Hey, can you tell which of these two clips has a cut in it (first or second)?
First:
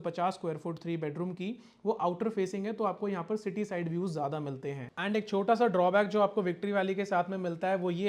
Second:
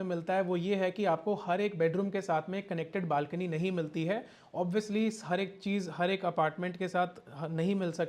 first